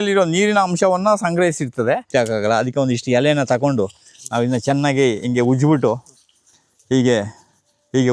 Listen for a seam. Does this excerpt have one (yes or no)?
yes